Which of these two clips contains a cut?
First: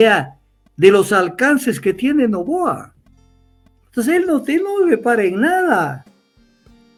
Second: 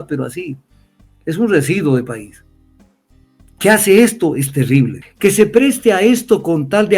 second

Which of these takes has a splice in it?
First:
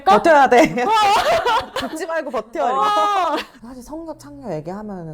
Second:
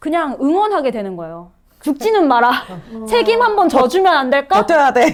first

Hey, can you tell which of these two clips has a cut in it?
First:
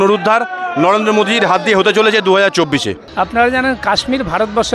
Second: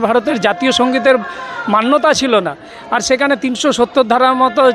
first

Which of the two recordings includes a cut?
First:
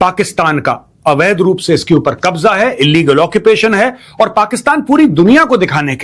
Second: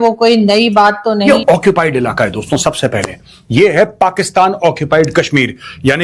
second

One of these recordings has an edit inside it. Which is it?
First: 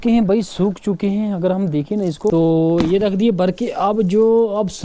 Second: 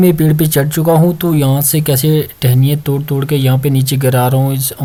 first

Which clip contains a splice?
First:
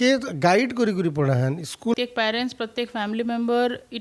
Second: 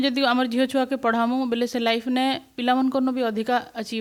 first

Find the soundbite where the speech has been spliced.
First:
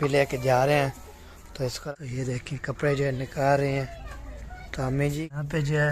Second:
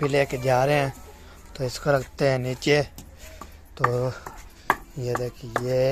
first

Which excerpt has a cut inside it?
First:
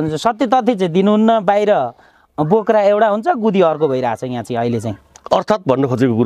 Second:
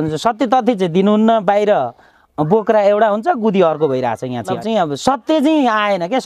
second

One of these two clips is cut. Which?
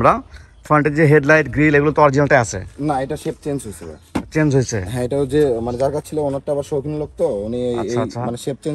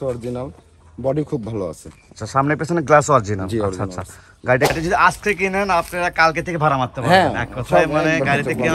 second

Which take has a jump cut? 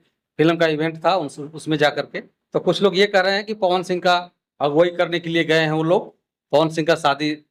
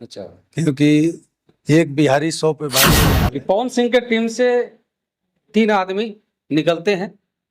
second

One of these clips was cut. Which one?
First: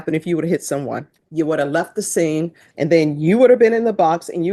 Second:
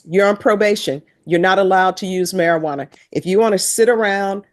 first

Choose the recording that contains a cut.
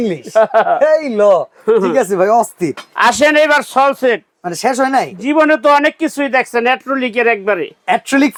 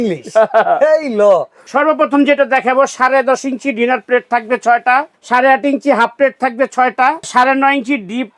second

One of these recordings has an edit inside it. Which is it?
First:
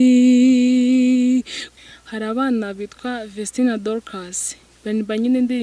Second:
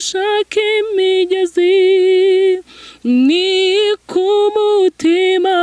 first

